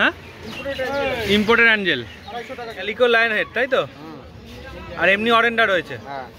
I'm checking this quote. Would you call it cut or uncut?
cut